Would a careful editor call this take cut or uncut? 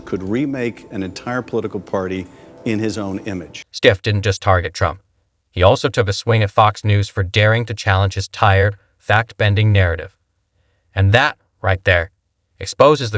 uncut